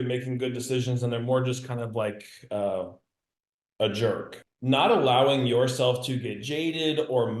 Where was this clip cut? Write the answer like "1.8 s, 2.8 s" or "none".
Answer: 4.3 s

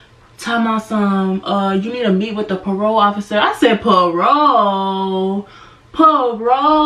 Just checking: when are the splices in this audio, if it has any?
none

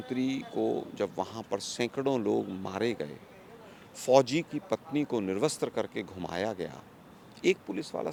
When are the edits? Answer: none

